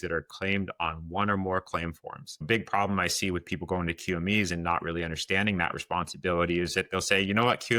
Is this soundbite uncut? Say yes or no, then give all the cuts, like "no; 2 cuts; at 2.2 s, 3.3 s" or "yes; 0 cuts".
no; 1 cut; at 2.4 s